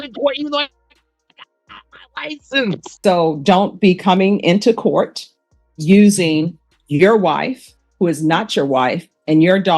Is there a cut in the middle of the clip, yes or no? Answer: yes